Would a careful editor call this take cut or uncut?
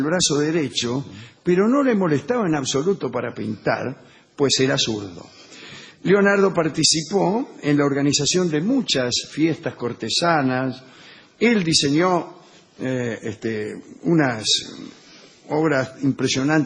uncut